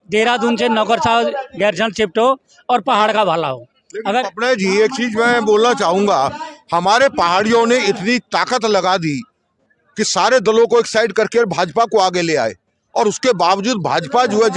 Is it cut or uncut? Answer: uncut